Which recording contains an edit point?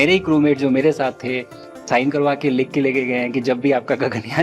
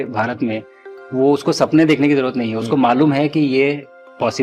first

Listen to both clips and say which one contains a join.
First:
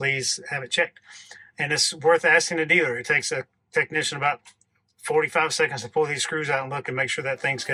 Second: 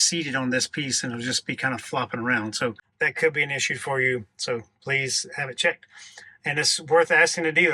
second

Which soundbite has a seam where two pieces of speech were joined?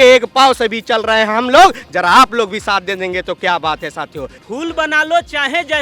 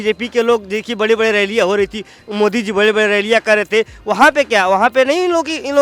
first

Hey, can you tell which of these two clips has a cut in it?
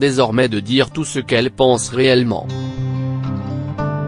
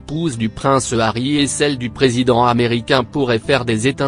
first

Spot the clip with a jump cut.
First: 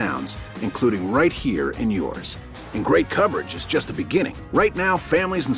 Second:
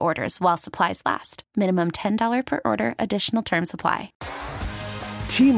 second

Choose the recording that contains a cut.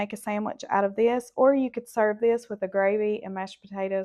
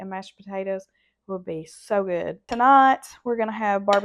second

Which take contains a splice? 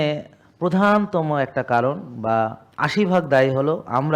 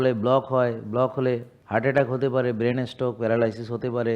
second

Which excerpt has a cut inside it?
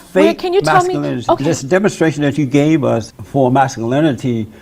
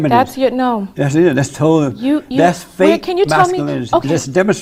first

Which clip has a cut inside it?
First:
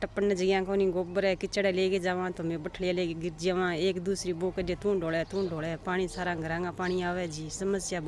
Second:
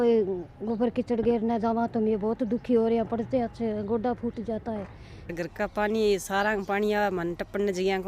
second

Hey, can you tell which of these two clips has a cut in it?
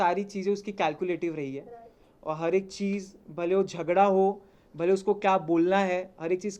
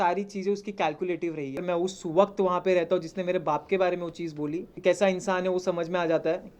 second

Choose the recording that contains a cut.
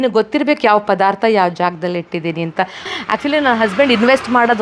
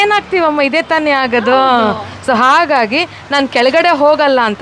first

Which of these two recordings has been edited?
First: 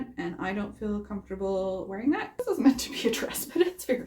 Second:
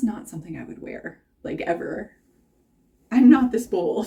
first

